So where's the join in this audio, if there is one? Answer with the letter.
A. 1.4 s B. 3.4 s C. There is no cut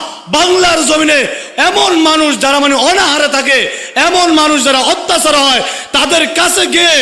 A